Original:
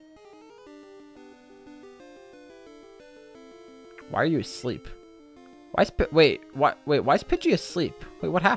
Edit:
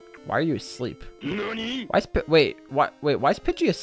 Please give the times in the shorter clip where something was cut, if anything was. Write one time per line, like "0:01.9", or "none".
none